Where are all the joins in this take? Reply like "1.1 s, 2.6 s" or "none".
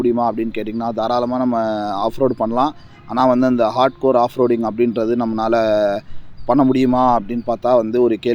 none